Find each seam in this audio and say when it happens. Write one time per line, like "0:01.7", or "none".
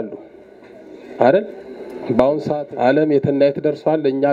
0:02.5

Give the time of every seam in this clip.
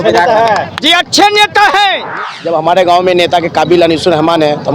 0:02.1

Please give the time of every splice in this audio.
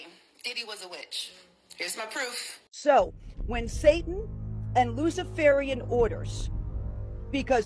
0:02.7

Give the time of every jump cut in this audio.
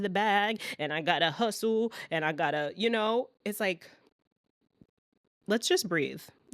0:04.7

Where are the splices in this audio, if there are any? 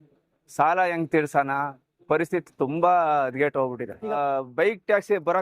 0:04.1

